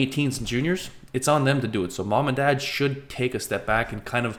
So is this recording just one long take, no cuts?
yes; 0 cuts

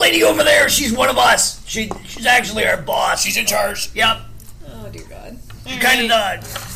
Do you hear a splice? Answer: no; 0 cuts

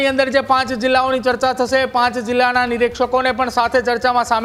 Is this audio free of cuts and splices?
yes; 0 cuts

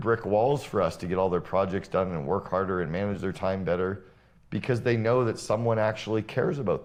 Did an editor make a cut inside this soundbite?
no; 0 cuts

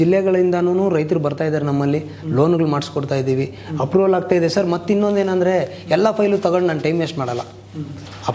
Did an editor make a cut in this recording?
no; 0 cuts

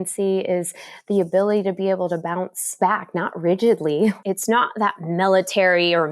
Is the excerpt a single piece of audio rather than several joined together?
no; 2 cuts; at 2.7 s, 4.2 s

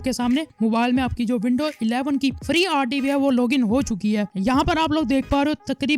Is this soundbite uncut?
no; 1 cut; at 4.3 s

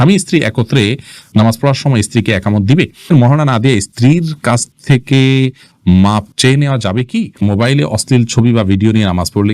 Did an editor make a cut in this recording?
yes; 2 cuts; at 3.1 s, 7.4 s

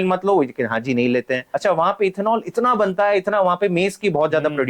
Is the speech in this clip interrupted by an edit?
yes; 1 cut; at 1.5 s

